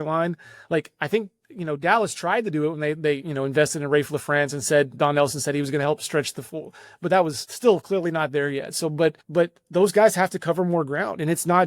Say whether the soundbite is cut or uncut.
cut